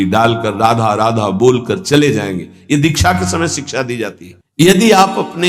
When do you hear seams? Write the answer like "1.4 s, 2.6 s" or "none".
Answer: none